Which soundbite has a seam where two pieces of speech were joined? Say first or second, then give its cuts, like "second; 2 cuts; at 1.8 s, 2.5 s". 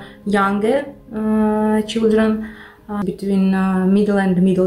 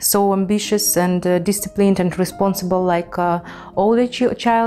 first; 1 cut; at 2.9 s